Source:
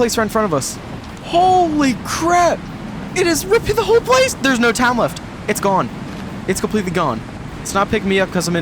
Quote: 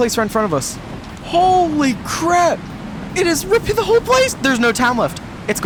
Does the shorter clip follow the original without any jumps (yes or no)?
yes